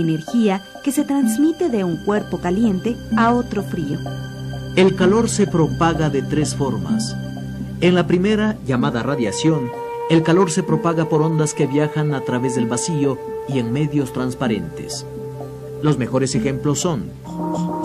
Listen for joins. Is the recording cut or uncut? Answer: uncut